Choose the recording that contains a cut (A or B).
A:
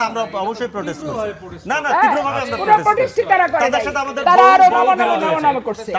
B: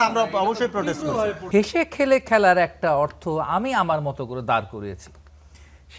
B